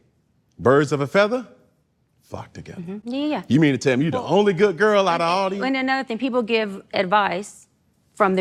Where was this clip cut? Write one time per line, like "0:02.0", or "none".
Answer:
none

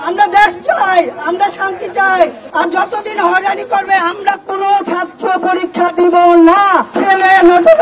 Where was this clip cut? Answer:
0:02.4
0:06.9

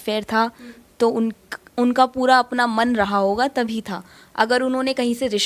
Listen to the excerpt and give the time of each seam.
none

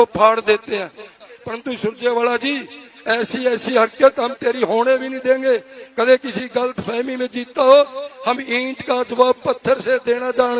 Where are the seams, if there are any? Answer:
0:01.1

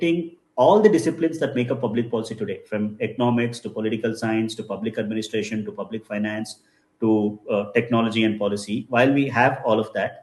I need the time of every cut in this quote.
none

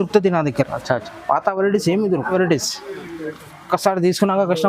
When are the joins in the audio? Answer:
0:02.3

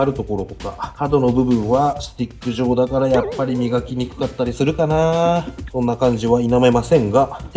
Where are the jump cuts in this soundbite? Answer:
none

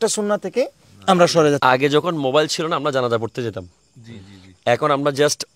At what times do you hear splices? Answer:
0:01.6

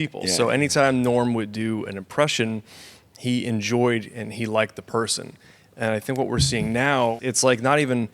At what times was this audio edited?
0:07.2

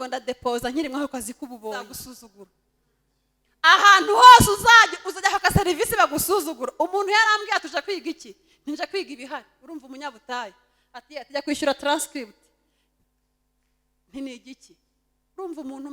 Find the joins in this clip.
0:02.0

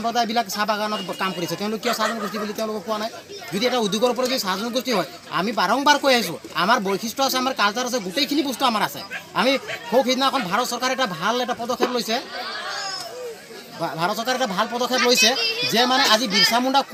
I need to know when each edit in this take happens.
none

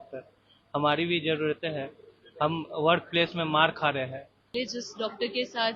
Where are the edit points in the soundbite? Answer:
0:04.4

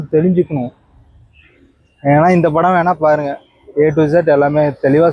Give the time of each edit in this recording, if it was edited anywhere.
none

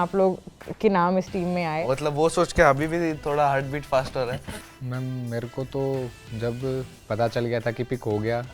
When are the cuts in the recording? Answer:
0:01.8
0:04.4

